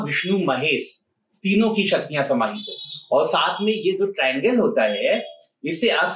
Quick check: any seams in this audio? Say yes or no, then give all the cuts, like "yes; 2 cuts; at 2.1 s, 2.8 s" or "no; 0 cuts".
no; 0 cuts